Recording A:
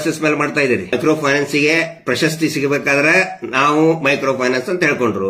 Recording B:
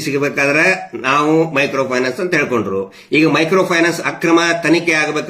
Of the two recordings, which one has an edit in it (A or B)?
A